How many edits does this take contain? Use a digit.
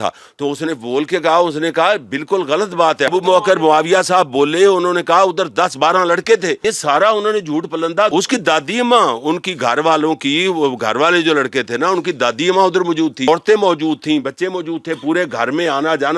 4